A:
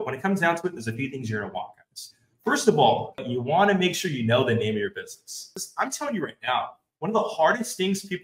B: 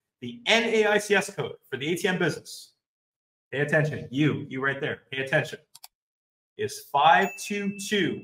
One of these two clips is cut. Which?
A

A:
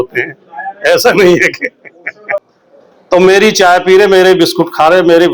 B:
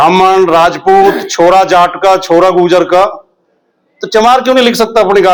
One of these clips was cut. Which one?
A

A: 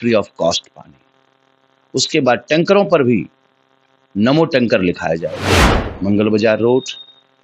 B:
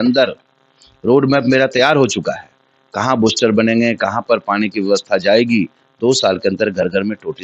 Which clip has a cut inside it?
A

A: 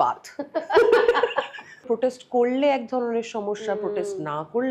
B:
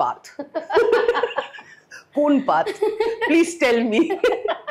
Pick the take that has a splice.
A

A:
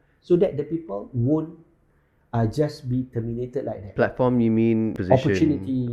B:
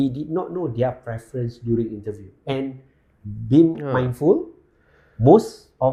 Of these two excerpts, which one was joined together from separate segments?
A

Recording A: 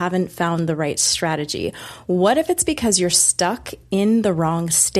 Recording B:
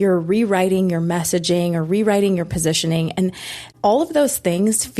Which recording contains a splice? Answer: B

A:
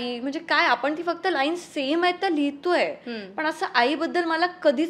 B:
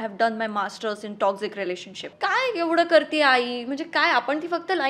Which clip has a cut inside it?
B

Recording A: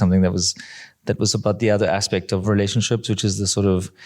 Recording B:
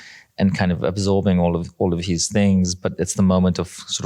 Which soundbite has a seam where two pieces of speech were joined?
A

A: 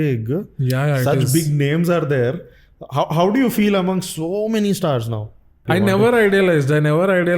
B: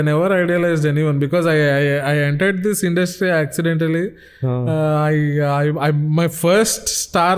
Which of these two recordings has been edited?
A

